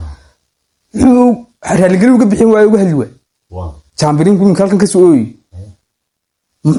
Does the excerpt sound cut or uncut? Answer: uncut